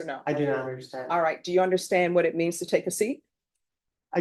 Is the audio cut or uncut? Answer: uncut